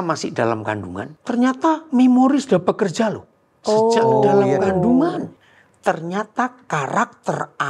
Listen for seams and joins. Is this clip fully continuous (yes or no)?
no